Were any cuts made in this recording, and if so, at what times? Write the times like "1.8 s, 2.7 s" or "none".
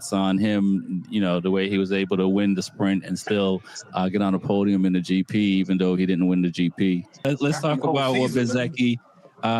7.3 s